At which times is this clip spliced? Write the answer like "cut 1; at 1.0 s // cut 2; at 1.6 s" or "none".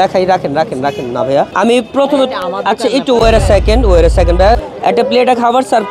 cut 1; at 1.5 s // cut 2; at 4.4 s

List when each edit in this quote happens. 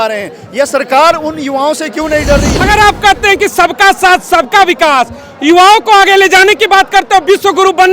cut 1; at 2.6 s

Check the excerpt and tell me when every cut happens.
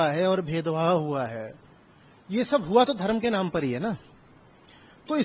none

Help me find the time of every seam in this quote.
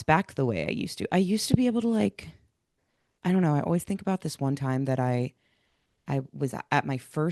none

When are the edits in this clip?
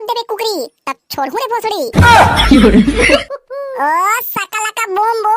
cut 1; at 3.2 s

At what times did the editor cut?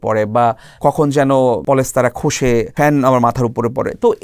cut 1; at 0.8 s // cut 2; at 1.6 s // cut 3; at 2.7 s

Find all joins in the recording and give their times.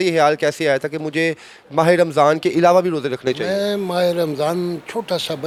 none

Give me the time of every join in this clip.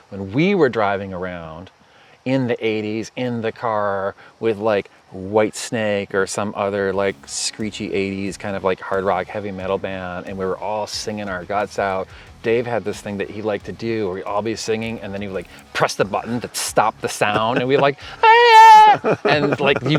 none

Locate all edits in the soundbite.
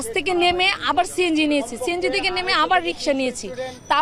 none

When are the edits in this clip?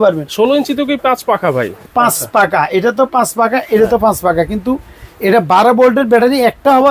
cut 1; at 1.8 s

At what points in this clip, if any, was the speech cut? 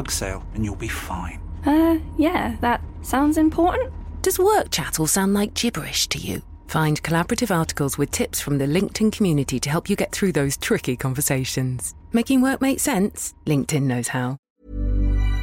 cut 1; at 14.4 s

